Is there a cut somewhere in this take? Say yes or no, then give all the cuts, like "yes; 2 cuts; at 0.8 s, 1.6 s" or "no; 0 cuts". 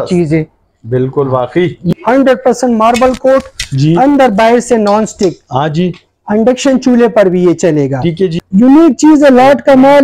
yes; 2 cuts; at 1.9 s, 8.4 s